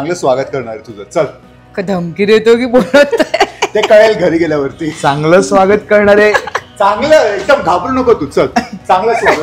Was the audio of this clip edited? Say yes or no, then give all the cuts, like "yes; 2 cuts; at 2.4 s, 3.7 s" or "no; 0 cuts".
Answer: no; 0 cuts